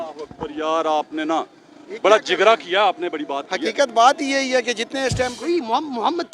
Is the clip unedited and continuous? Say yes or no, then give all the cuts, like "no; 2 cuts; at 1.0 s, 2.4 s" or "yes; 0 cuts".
no; 1 cut; at 5.4 s